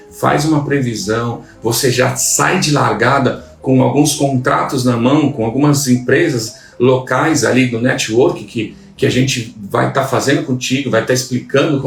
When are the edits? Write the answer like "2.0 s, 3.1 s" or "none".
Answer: none